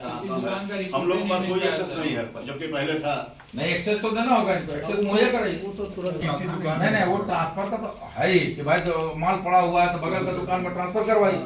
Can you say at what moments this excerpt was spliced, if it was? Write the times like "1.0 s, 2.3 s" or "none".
6.2 s